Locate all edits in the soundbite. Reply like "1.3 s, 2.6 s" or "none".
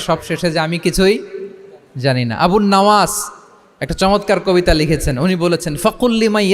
none